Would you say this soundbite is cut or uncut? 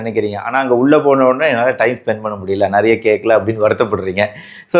uncut